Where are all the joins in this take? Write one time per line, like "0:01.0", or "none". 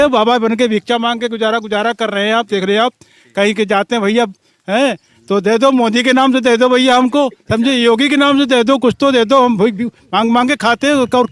none